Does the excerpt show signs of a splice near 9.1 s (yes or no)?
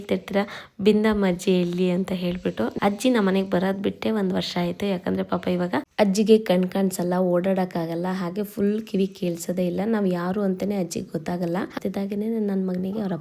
no